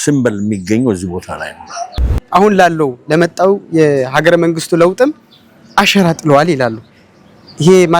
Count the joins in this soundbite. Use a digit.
1